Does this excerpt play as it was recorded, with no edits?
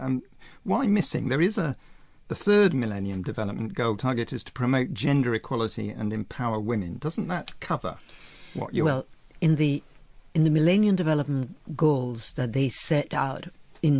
no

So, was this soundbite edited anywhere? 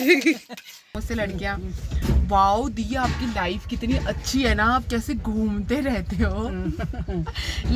yes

